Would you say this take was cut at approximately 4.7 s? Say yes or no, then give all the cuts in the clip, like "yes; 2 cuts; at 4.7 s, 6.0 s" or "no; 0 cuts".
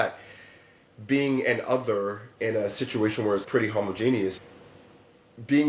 no; 0 cuts